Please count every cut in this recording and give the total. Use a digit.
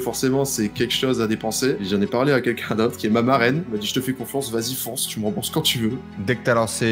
4